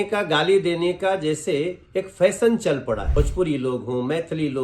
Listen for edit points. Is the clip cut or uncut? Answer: cut